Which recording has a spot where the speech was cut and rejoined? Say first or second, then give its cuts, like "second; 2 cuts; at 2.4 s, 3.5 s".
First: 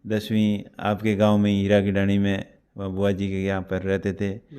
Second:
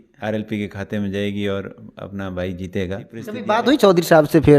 second; 1 cut; at 3.3 s